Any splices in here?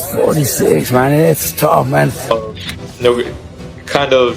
yes; 1 cut; at 2.3 s

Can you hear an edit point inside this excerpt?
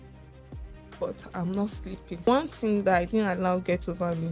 yes; 1 cut; at 2.3 s

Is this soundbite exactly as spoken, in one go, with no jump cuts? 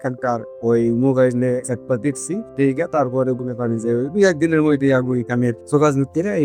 yes; 0 cuts

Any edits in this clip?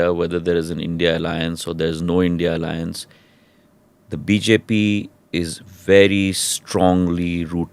no; 0 cuts

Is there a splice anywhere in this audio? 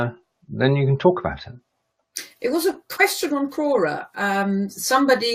yes; 1 cut; at 1.0 s

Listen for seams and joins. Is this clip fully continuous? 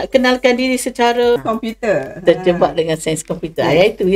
no; 1 cut; at 1.3 s

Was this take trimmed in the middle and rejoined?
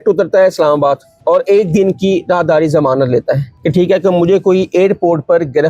yes; 2 cuts; at 1.1 s, 3.5 s

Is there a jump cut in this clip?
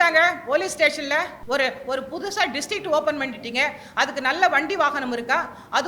yes; 1 cut; at 1.4 s

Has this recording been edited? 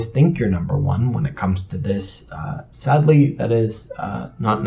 no; 0 cuts

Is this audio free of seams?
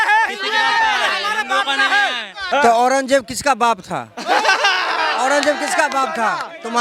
no; 1 cut; at 2.3 s

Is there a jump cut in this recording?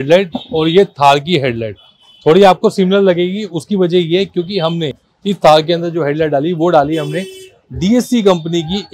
no; 0 cuts

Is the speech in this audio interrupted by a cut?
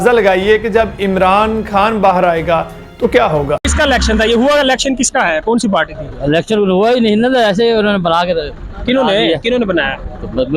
yes; 1 cut; at 3.7 s

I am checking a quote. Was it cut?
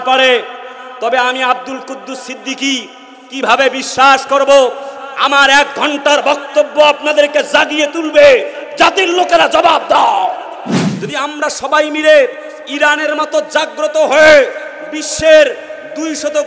yes; 1 cut; at 10.9 s

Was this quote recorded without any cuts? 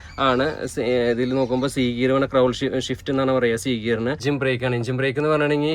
no; 1 cut; at 4.2 s

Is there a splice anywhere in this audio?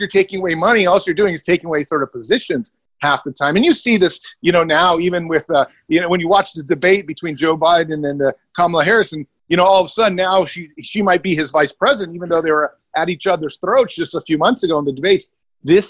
no; 0 cuts

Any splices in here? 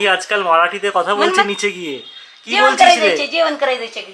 no; 0 cuts

